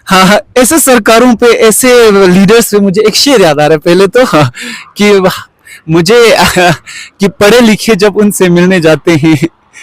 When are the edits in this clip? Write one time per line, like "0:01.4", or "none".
none